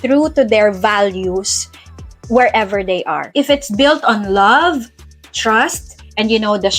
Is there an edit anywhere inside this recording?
yes; 1 cut; at 3.3 s

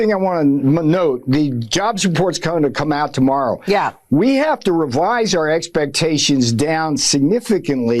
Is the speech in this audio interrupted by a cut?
no; 0 cuts

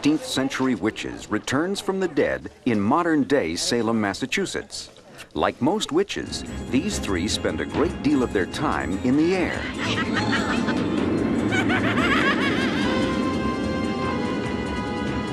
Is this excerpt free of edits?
no; 1 cut; at 6.8 s

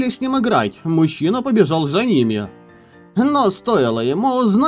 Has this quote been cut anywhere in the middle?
no; 0 cuts

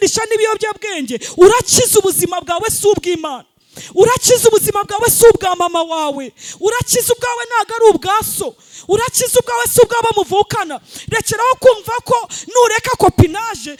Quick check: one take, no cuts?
yes; 0 cuts

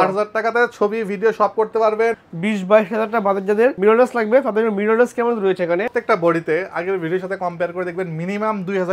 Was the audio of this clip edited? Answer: yes; 2 cuts; at 2.2 s, 5.9 s

